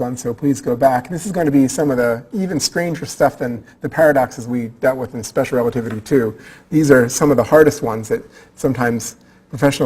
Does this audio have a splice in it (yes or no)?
yes